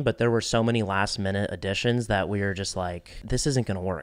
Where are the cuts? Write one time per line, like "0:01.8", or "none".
0:03.1